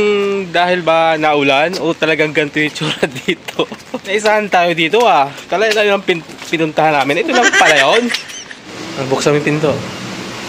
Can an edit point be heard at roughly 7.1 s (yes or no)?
no